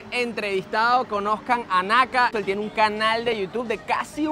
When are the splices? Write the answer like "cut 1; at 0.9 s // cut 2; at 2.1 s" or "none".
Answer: cut 1; at 2.3 s